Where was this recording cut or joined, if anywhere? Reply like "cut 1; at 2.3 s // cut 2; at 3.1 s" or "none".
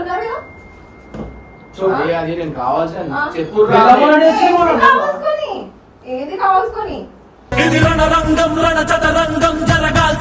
none